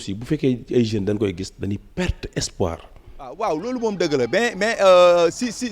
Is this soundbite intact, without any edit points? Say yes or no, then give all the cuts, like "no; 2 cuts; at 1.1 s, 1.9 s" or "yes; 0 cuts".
no; 1 cut; at 3.3 s